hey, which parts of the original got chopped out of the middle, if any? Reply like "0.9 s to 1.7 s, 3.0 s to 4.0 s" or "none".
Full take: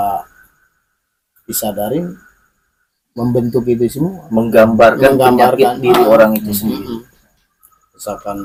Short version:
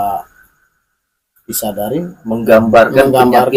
2.2 s to 4.2 s